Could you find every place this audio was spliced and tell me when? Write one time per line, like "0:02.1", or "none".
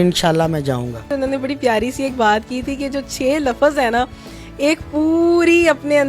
0:01.1

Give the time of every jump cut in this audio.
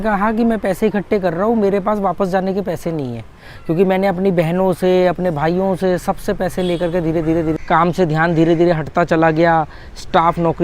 0:07.6

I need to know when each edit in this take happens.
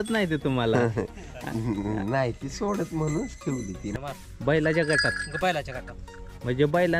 0:03.9

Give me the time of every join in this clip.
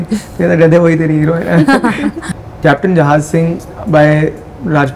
0:02.2
0:03.6

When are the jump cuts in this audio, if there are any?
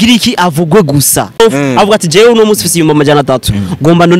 0:01.4

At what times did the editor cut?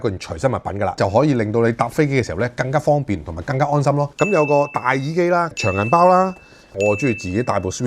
0:01.0
0:04.1
0:06.8

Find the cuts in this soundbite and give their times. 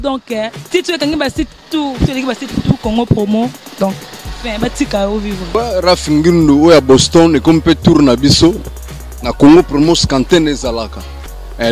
none

